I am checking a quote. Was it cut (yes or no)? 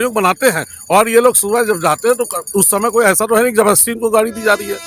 no